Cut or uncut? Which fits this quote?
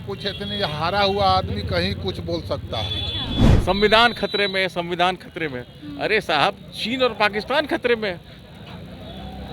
cut